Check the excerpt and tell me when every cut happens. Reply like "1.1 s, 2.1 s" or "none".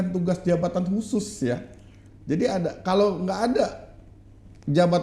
none